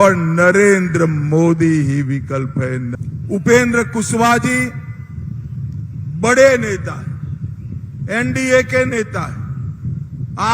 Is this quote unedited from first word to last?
no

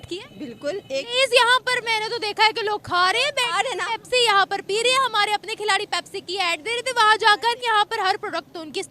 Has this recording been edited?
yes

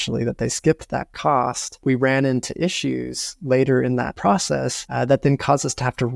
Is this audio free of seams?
no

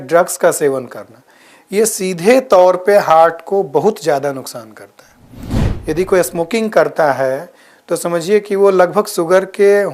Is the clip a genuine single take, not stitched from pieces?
yes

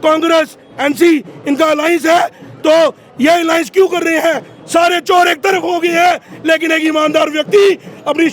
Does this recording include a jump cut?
no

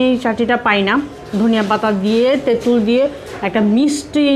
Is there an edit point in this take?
no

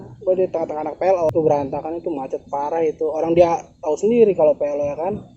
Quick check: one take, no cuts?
no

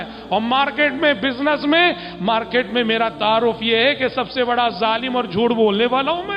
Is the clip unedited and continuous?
yes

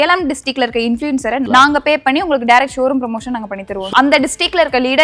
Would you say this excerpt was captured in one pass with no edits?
no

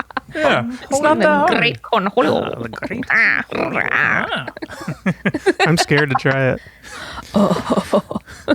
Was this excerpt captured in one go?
no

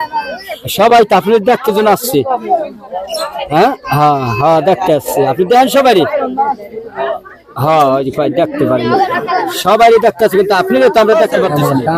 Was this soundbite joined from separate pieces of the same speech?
no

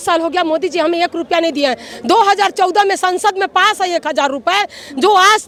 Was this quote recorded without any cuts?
yes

